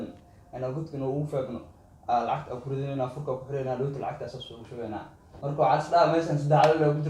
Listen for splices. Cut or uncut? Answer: cut